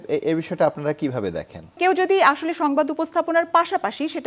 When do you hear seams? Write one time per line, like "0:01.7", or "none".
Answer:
0:01.8

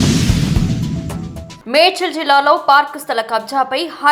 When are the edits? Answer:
none

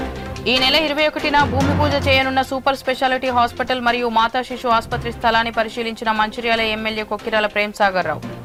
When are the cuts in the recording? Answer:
none

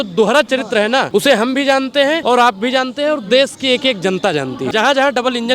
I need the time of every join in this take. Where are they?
0:01.1
0:02.2
0:04.7

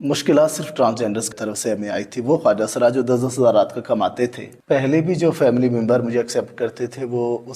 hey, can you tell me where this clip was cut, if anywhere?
0:01.3
0:04.5

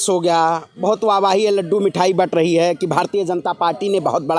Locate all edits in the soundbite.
none

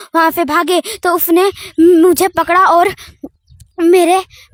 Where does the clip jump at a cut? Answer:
none

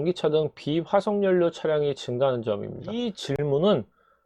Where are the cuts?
0:03.3

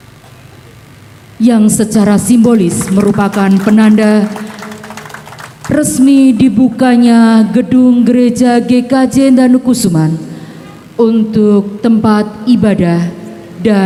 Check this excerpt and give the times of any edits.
none

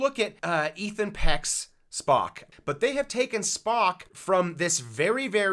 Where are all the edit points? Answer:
0:02.4

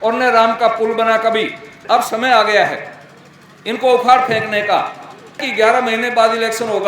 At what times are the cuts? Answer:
0:01.7
0:05.4

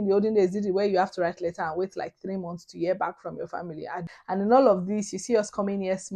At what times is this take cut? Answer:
0:04.0

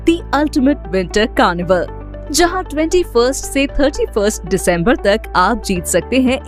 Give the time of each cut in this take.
none

